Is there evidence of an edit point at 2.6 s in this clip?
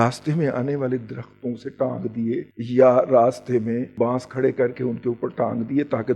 yes; 2 cuts; at 2.6 s, 3.9 s

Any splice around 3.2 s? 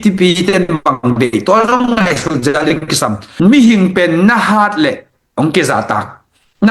yes; 1 cut; at 3.2 s

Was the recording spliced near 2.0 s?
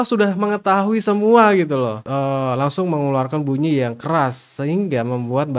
yes; 1 cut; at 2.0 s

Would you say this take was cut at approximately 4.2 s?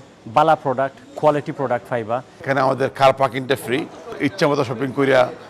yes; 2 cuts; at 2.4 s, 4.2 s

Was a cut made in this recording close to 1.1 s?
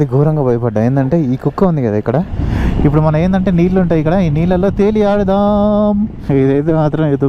no; 2 cuts; at 2.3 s, 6.2 s

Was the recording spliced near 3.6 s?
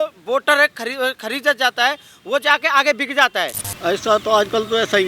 yes; 1 cut; at 3.6 s

